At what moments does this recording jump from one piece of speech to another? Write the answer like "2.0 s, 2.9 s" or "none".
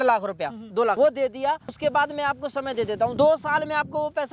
1.0 s, 1.8 s, 3.1 s